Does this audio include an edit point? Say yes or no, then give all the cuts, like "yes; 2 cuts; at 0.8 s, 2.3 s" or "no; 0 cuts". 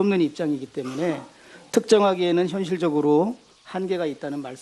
no; 0 cuts